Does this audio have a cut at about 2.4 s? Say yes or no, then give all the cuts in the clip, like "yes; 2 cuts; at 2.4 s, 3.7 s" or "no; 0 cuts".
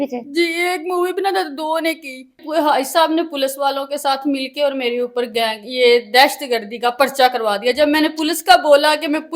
yes; 1 cut; at 2.4 s